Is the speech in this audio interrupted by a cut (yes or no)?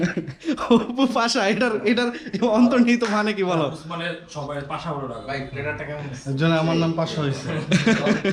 no